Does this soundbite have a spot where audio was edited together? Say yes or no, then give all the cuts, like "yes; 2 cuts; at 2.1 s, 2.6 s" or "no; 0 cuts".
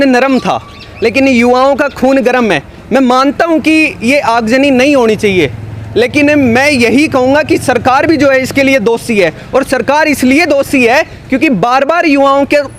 no; 0 cuts